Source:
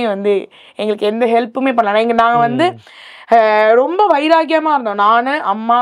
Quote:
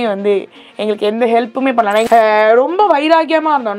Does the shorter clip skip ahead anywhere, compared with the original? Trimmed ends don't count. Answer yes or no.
yes